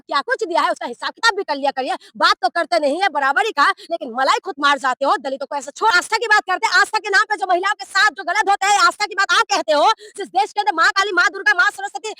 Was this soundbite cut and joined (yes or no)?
yes